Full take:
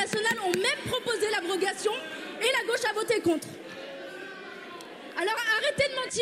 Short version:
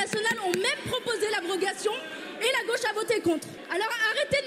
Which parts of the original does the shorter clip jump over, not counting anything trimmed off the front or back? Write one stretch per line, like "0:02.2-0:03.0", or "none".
0:03.6-0:05.0